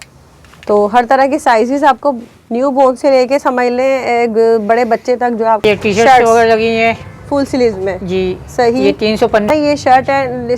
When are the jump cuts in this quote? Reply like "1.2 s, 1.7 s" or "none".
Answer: 5.6 s, 9.5 s